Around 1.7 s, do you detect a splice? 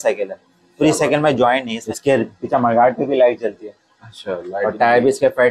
yes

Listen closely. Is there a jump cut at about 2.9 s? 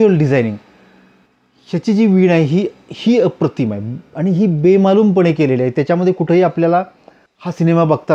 no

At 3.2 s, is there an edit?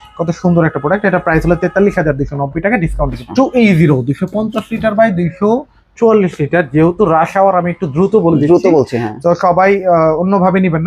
yes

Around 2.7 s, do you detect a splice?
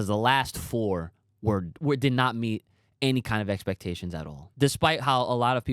no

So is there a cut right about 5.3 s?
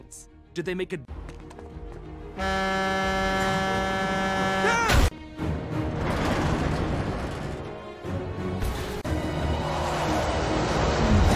yes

